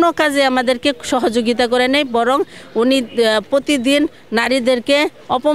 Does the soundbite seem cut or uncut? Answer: uncut